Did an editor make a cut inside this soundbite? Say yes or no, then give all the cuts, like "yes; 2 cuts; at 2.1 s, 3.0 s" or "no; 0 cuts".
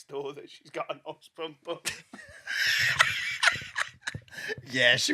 no; 0 cuts